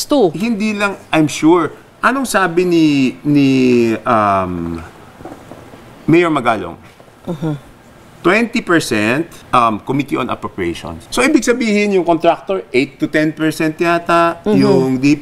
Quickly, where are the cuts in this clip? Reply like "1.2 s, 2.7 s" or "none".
9.4 s, 10.9 s